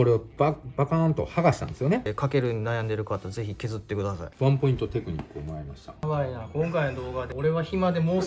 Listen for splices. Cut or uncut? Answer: cut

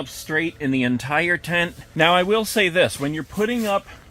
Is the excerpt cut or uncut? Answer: uncut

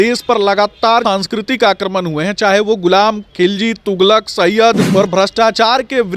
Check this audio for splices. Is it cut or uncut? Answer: cut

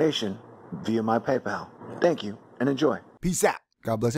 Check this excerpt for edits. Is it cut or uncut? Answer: uncut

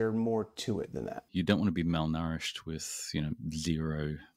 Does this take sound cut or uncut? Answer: cut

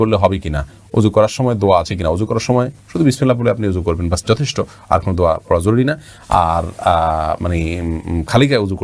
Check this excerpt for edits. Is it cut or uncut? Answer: uncut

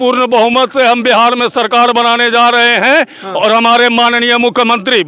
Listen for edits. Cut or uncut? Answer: uncut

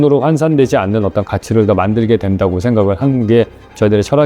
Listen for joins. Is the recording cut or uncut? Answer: uncut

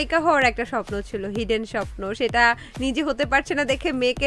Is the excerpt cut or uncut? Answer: uncut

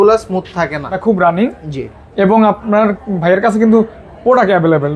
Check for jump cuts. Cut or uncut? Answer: cut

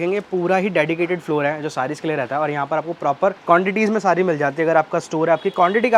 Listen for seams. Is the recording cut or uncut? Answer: uncut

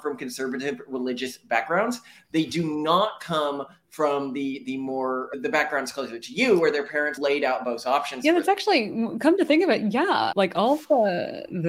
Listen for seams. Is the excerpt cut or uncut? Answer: uncut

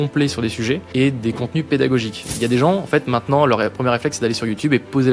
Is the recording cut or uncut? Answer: cut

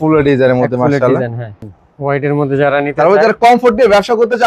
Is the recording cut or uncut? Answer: cut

